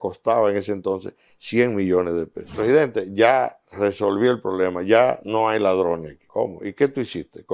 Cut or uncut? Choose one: cut